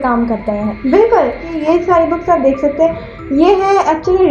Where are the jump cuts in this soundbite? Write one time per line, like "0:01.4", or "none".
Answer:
0:01.5